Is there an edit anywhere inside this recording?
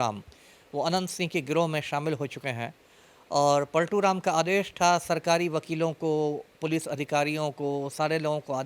no; 0 cuts

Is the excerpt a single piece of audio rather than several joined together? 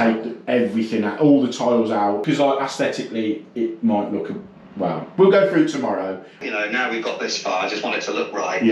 no; 2 cuts; at 2.2 s, 6.4 s

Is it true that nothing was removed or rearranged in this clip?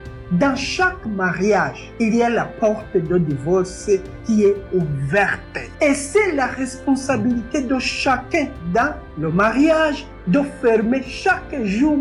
yes; 0 cuts

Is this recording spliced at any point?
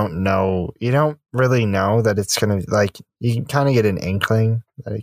no; 0 cuts

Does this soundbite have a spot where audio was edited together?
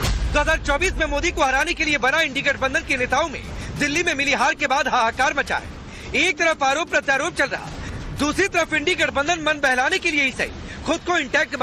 no; 0 cuts

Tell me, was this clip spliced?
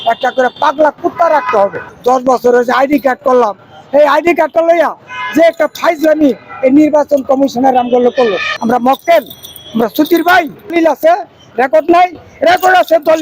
yes; 3 cuts; at 1.9 s, 8.5 s, 10.7 s

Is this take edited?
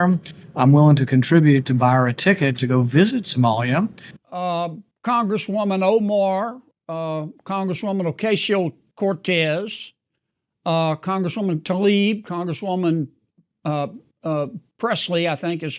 yes; 1 cut; at 4.1 s

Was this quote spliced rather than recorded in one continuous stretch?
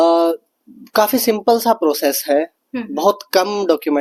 no; 0 cuts

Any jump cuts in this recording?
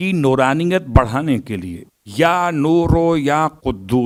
no; 0 cuts

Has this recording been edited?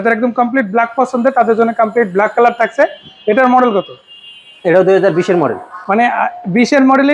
no; 0 cuts

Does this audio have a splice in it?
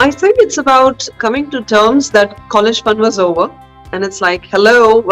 no; 0 cuts

